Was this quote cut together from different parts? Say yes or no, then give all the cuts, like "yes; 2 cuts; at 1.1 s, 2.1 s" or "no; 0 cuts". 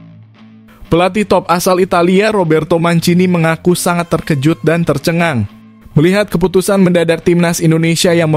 yes; 1 cut; at 0.9 s